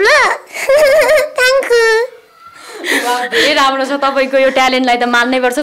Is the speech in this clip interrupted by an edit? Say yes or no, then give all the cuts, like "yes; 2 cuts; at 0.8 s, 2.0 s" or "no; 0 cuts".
no; 0 cuts